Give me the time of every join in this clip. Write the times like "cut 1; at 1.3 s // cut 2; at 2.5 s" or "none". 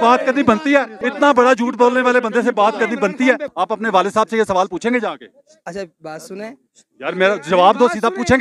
cut 1; at 1.0 s // cut 2; at 3.5 s

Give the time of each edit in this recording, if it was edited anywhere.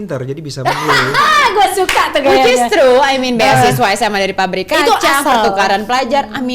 none

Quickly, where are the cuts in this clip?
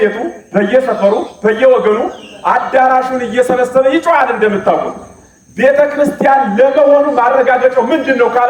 none

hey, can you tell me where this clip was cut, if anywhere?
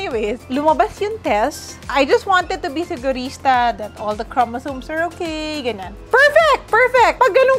cut 1; at 1.9 s // cut 2; at 5.9 s

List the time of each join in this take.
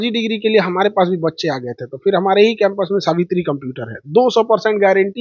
none

